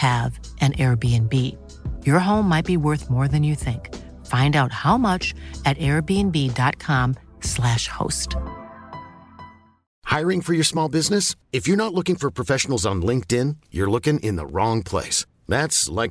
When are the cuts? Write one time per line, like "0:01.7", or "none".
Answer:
0:09.9